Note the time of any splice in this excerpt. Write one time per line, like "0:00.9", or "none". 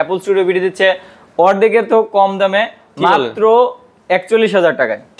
none